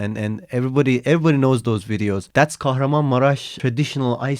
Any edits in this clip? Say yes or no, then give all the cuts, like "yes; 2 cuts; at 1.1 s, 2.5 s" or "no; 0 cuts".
yes; 2 cuts; at 2.2 s, 3.5 s